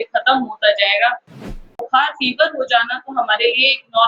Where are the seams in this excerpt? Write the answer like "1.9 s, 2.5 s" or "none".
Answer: 1.7 s

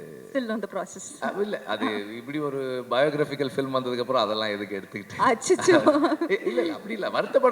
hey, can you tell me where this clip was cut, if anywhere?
none

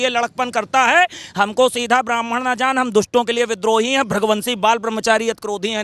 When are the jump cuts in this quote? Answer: none

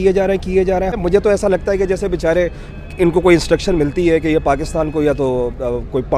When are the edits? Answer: 1.0 s

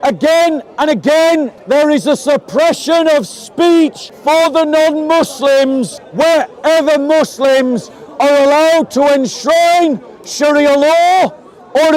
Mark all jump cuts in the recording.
1.6 s, 4.1 s, 6.0 s

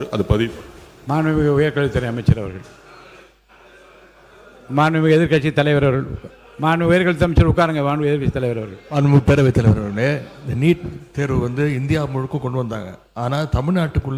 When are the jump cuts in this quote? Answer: none

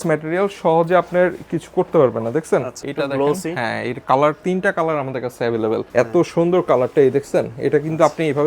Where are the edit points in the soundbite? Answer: 2.8 s, 5.8 s

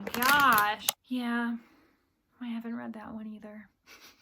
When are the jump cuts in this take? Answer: 1.0 s

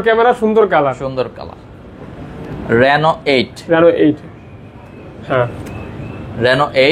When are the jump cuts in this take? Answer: none

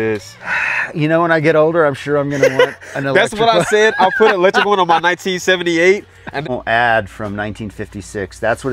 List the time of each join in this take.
6.4 s

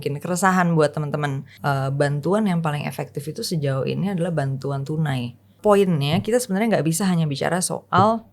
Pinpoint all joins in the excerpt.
1.5 s, 5.6 s

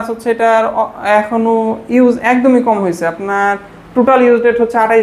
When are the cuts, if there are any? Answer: none

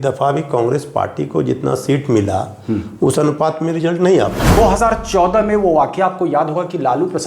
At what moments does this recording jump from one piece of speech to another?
4.6 s

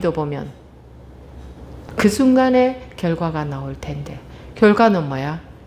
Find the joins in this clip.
1.9 s

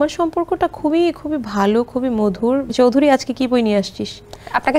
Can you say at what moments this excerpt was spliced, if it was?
2.7 s

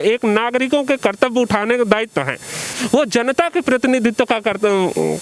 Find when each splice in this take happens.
2.8 s

